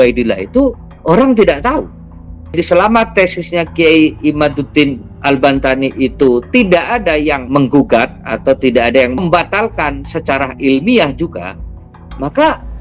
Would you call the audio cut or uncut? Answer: cut